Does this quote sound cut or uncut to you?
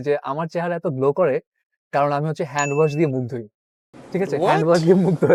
uncut